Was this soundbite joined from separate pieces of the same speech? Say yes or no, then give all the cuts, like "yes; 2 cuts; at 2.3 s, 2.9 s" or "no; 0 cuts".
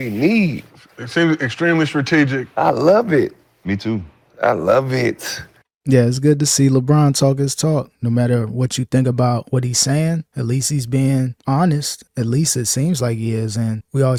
no; 0 cuts